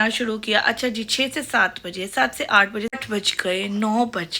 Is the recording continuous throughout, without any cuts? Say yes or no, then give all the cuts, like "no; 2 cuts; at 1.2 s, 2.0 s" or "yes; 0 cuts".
no; 1 cut; at 2.9 s